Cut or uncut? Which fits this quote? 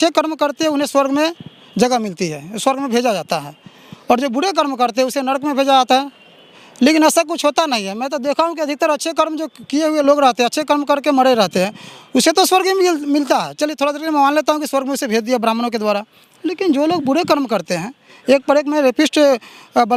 uncut